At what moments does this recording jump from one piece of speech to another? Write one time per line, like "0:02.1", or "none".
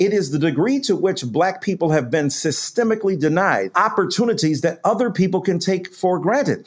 none